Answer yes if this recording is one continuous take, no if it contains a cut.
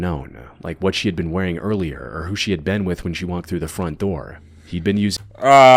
yes